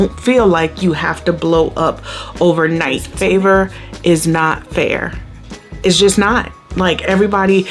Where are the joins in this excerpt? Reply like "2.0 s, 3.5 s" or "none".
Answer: 3.1 s